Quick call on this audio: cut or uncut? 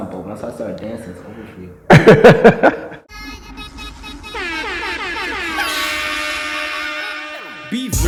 cut